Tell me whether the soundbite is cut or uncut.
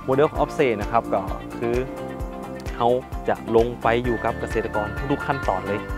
uncut